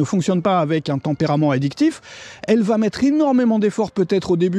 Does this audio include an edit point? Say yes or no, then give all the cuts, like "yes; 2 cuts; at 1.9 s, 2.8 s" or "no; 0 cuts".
no; 0 cuts